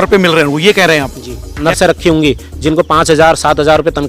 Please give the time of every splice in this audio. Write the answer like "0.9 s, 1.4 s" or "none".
1.6 s